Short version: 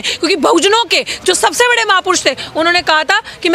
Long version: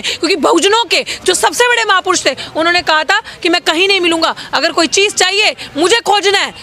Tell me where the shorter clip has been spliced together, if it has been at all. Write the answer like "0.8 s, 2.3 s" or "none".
none